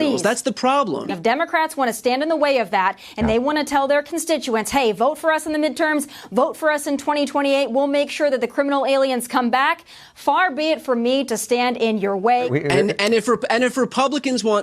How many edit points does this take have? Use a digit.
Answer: 2